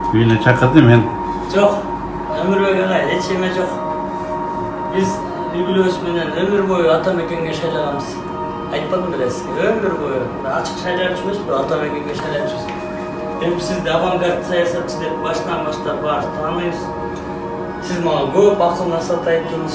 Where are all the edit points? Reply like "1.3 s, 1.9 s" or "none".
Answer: none

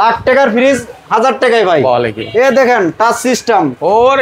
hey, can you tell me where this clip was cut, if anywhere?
none

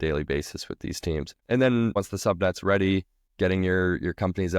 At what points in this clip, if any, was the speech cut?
1.3 s, 2.0 s, 3.2 s

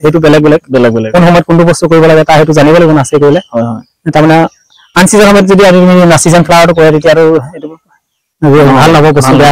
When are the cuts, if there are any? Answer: none

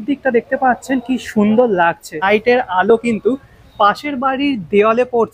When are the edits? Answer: 2.2 s

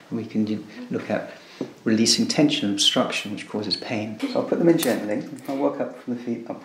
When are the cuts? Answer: 4.1 s

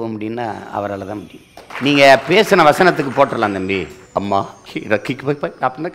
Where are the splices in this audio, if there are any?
1.6 s, 4.0 s, 4.6 s

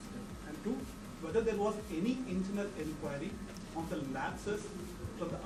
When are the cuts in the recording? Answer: none

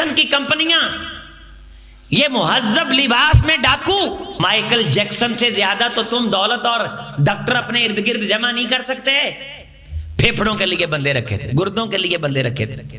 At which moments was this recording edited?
4.4 s

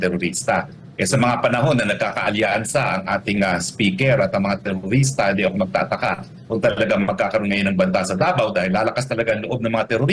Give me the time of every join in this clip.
none

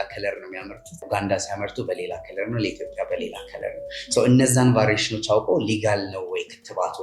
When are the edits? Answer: 1.1 s

